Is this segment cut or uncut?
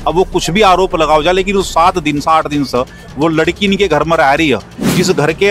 uncut